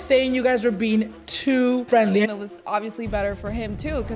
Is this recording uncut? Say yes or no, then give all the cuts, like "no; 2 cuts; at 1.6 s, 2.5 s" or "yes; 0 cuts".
no; 1 cut; at 2.3 s